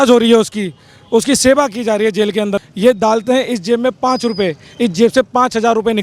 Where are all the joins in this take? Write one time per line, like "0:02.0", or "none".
0:02.6